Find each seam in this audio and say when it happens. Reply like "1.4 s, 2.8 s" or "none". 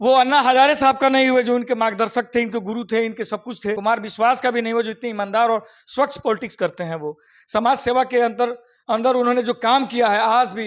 3.8 s